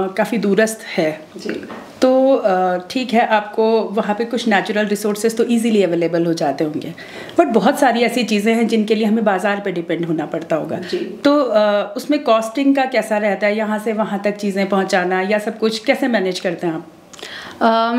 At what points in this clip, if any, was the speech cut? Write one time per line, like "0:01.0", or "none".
none